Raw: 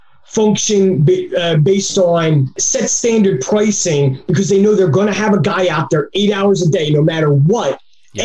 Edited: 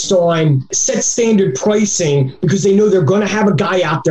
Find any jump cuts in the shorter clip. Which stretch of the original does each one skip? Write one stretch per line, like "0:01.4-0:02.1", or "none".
none